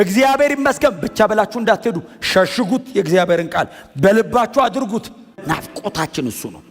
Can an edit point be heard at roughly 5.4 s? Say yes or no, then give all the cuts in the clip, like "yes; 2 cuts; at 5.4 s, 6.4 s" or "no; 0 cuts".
yes; 1 cut; at 5.4 s